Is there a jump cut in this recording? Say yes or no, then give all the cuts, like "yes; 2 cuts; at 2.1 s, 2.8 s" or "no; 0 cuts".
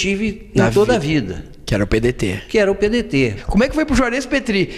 yes; 1 cut; at 3.4 s